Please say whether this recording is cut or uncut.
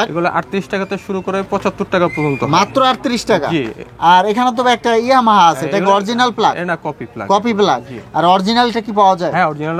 uncut